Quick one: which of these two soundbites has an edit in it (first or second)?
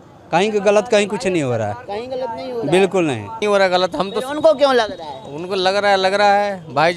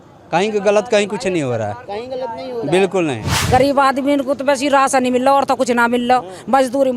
second